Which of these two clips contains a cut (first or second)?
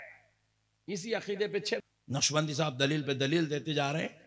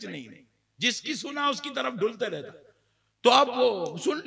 first